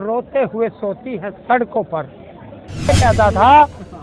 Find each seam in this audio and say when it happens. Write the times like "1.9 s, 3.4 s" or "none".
2.9 s